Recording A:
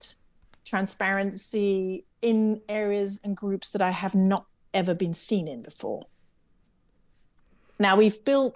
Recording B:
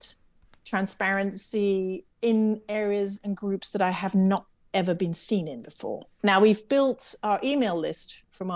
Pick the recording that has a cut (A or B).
B